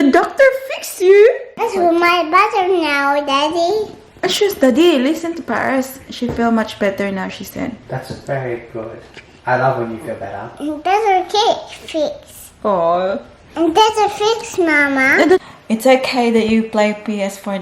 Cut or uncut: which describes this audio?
cut